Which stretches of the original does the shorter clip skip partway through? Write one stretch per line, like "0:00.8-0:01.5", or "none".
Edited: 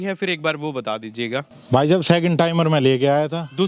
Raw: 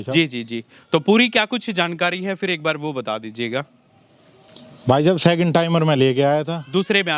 0:03.8-0:04.7